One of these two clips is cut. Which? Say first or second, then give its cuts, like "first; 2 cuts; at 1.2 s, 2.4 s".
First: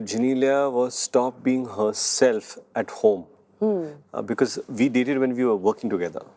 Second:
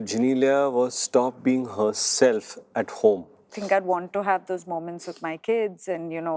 second; 1 cut; at 3.5 s